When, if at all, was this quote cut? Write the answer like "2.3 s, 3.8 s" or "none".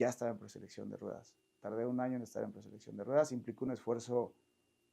none